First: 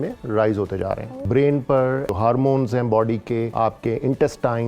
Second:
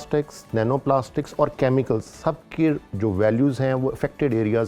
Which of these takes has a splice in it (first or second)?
first